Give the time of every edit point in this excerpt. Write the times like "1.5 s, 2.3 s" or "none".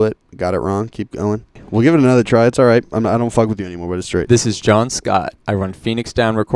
1.6 s, 5.4 s